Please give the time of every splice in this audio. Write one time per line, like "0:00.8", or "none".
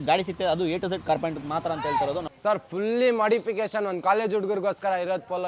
0:02.3